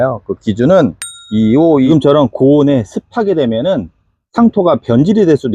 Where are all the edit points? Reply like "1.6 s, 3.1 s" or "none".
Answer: 1.9 s